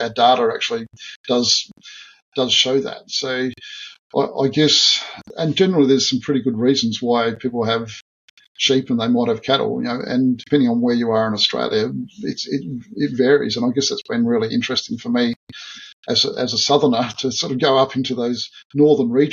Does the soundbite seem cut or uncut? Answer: cut